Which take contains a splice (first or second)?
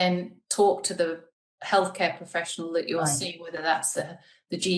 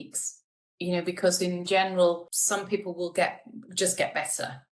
second